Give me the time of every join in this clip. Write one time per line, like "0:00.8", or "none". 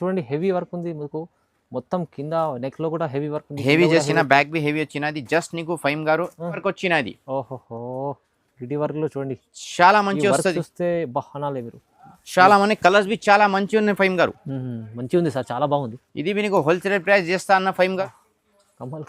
0:06.6
0:18.0